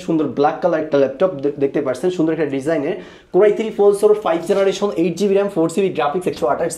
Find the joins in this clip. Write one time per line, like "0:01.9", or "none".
none